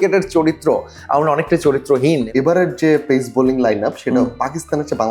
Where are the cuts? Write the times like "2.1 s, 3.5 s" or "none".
2.3 s